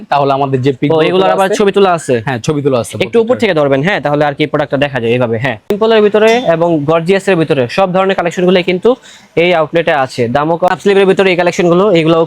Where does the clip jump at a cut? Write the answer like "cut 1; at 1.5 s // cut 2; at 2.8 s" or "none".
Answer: cut 1; at 5.7 s // cut 2; at 10.7 s